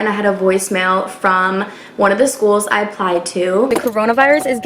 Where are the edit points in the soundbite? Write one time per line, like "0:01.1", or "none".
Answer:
0:03.7